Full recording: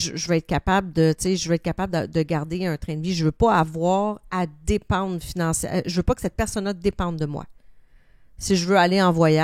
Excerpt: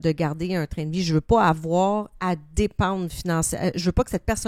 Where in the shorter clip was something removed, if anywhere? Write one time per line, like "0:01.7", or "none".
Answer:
none